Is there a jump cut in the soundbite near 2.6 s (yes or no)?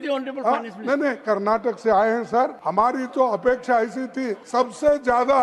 yes